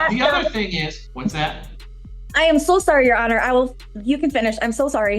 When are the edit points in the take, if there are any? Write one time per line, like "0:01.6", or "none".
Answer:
0:01.0